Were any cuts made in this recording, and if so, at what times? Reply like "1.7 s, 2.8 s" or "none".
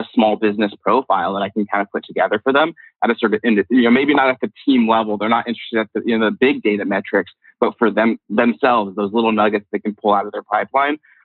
none